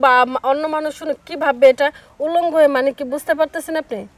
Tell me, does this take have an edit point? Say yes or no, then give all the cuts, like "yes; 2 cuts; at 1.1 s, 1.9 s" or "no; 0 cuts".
no; 0 cuts